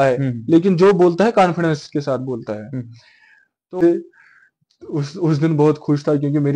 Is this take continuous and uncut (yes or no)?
no